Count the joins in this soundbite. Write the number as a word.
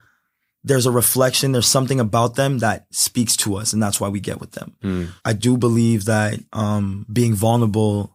two